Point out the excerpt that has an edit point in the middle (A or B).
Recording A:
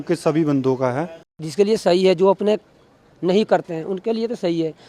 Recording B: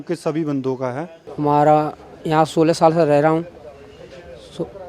A